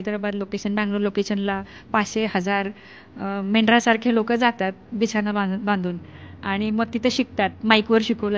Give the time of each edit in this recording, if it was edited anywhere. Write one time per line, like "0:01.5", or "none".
none